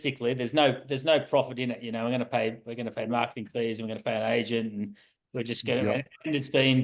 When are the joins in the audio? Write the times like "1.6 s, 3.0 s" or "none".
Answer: none